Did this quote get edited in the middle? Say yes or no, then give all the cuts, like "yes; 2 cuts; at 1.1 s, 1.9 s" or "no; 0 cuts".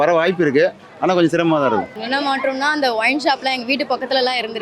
yes; 1 cut; at 1.9 s